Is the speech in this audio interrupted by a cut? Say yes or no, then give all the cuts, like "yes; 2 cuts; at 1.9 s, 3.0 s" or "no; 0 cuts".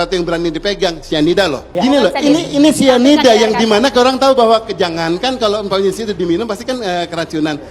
yes; 1 cut; at 1.6 s